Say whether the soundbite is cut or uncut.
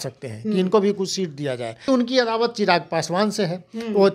cut